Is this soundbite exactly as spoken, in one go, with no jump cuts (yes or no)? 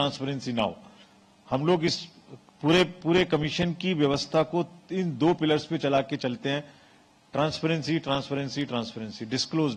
yes